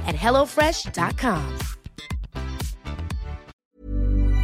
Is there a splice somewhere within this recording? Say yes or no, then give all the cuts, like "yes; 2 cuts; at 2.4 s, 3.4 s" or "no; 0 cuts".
yes; 1 cut; at 3.5 s